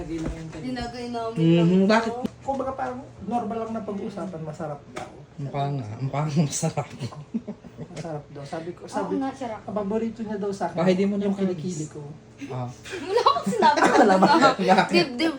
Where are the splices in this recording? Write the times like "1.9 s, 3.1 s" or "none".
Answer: 2.3 s